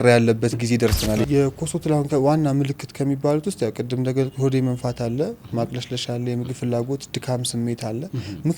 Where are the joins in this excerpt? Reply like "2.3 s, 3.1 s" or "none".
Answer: 1.2 s